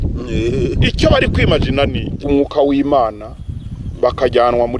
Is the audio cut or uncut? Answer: cut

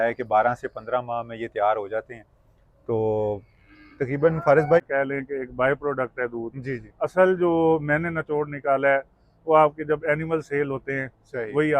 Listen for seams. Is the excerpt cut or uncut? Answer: cut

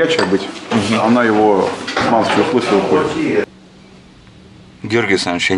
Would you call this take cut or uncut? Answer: cut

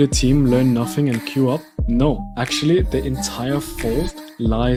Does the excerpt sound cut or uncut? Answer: uncut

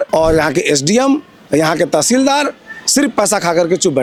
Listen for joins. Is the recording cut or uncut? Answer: uncut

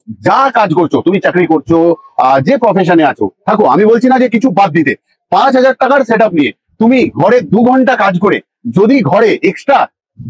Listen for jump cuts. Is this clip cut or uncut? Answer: uncut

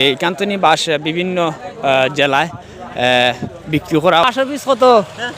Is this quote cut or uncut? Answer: cut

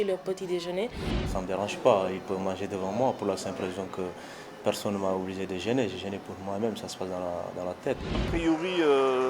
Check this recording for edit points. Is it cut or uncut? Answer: cut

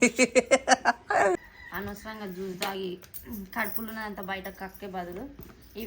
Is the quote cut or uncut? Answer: cut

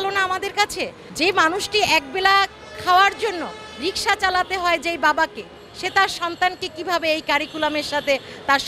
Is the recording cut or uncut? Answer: cut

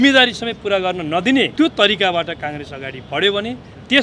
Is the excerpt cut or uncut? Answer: cut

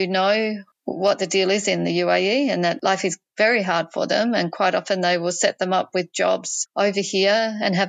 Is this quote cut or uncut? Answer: uncut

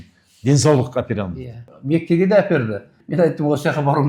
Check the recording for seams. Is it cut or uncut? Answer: cut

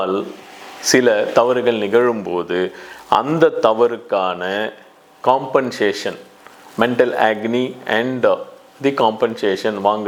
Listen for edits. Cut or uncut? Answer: uncut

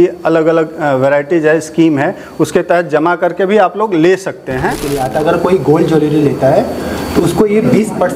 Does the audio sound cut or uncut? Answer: cut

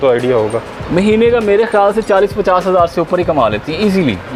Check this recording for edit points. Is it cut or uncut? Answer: uncut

